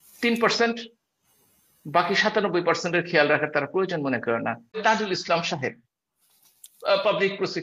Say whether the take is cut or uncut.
cut